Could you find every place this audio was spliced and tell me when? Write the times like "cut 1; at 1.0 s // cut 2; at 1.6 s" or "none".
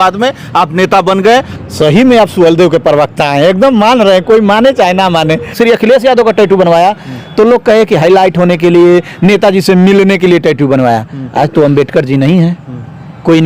cut 1; at 1.5 s // cut 2; at 5.5 s